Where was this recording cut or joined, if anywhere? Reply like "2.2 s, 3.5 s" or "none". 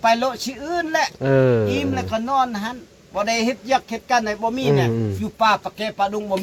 none